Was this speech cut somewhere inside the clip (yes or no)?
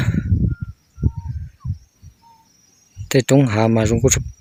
no